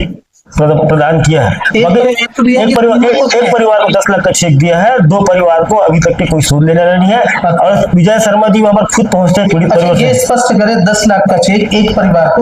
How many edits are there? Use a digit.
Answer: 0